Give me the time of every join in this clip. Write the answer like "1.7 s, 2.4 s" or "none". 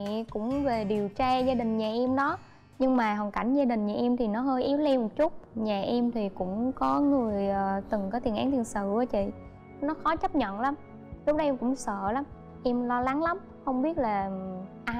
none